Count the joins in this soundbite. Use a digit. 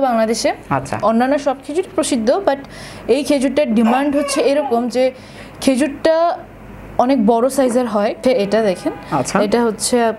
1